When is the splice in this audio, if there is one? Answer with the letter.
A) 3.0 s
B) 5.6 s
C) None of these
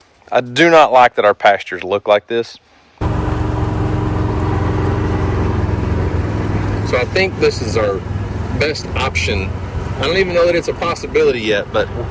A